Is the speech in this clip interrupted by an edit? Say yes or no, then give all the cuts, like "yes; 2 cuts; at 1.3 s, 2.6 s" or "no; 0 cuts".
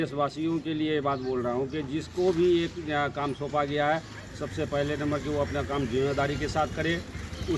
no; 0 cuts